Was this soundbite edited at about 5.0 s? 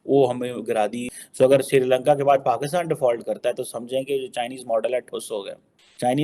no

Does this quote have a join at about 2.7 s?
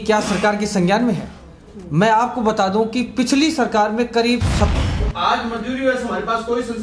no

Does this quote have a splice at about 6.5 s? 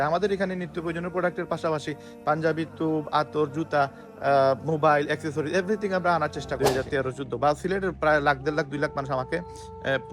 yes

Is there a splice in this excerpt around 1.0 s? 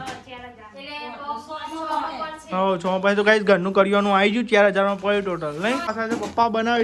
no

